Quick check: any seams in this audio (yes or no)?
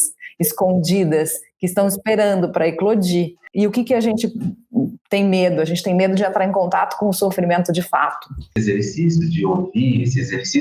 yes